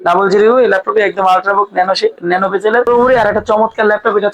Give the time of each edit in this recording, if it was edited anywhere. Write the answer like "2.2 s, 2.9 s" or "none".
2.9 s